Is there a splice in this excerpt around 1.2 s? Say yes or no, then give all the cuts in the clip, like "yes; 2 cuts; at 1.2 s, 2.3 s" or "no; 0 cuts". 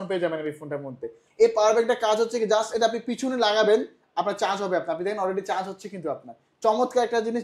yes; 1 cut; at 1.2 s